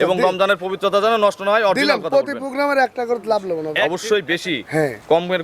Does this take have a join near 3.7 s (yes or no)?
yes